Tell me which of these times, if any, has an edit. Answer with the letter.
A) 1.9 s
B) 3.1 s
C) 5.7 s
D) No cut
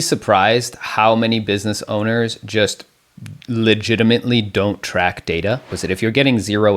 C